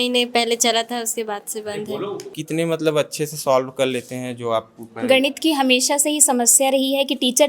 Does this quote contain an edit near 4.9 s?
no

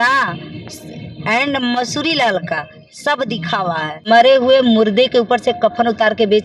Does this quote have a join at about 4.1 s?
yes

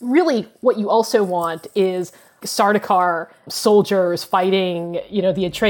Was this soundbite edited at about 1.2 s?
no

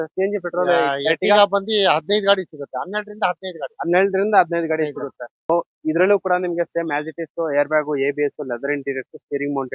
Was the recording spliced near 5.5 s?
yes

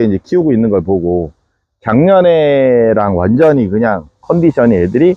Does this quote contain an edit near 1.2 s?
no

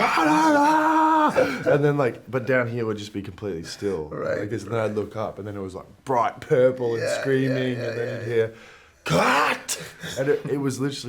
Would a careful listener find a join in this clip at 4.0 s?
no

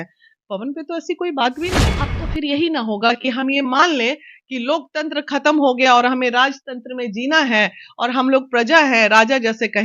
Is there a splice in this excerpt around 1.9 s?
yes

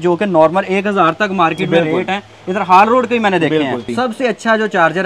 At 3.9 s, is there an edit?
yes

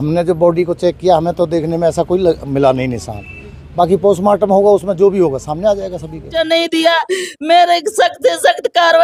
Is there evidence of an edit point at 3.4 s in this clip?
no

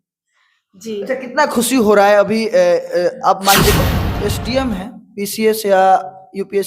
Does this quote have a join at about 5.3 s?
no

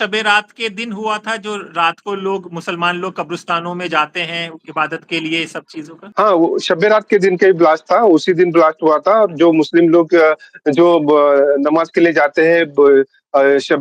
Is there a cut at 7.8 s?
no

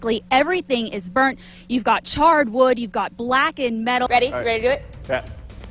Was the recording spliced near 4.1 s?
yes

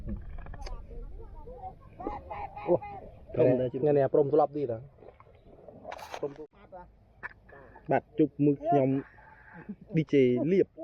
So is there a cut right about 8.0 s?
no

